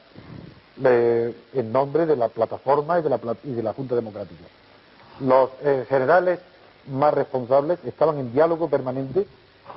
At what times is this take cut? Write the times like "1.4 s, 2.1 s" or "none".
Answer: none